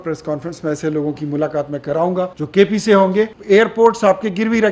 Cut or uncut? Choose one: cut